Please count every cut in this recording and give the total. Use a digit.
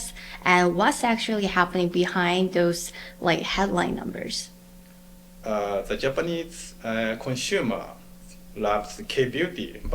1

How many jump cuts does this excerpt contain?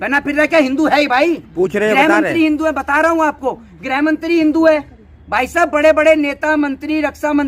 0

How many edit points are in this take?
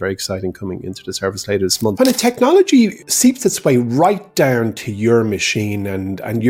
2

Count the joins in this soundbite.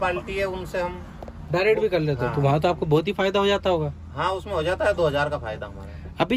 0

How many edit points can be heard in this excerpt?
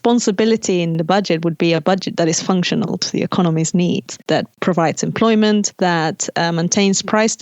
3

